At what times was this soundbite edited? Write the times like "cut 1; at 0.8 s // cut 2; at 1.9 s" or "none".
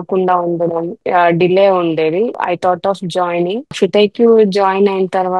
cut 1; at 1.0 s // cut 2; at 2.4 s // cut 3; at 3.7 s